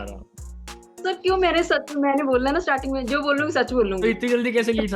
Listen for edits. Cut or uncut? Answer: uncut